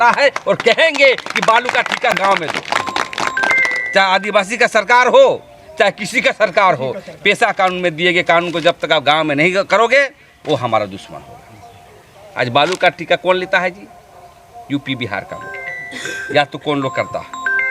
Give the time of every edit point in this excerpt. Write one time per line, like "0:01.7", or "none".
0:02.2